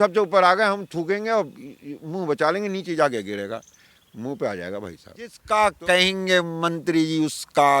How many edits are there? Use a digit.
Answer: 1